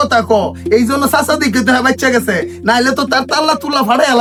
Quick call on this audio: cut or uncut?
uncut